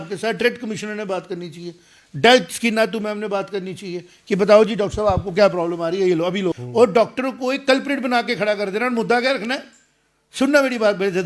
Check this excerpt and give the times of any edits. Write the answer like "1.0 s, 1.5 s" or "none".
6.6 s